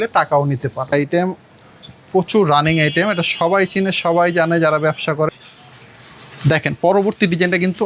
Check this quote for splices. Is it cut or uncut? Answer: cut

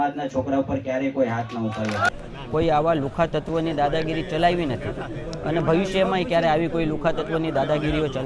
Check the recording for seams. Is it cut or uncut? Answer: cut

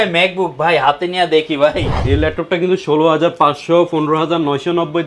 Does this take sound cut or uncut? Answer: cut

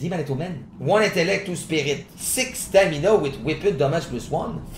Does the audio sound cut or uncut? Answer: uncut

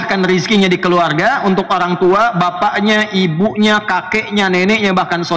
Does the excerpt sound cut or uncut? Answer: uncut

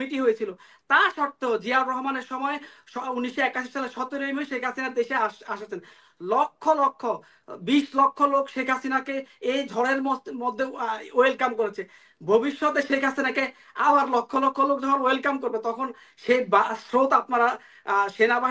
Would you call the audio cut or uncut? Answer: uncut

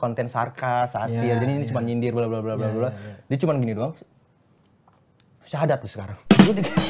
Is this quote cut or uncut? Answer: uncut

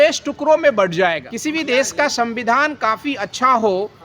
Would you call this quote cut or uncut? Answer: cut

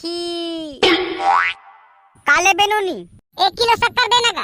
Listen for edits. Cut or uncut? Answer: cut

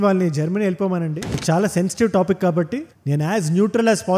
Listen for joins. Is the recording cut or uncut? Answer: cut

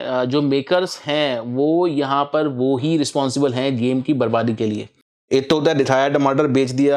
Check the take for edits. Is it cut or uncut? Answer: cut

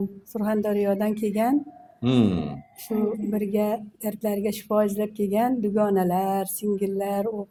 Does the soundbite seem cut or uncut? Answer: uncut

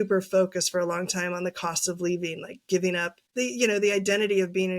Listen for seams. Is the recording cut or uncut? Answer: cut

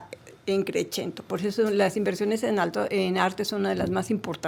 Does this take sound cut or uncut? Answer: uncut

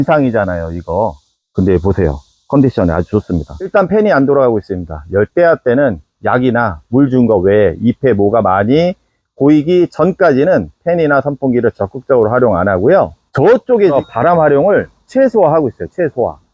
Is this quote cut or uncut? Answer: cut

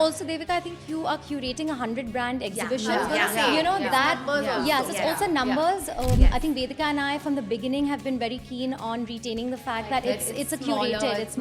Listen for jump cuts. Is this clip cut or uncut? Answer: uncut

